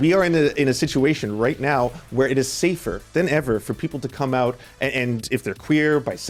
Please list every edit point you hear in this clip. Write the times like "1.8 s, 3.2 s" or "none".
none